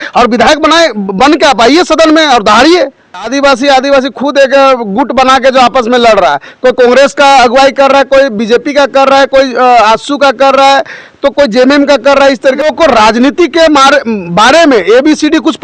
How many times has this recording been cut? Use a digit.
2